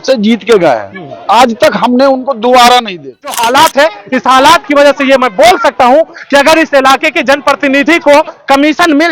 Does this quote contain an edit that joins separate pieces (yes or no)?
yes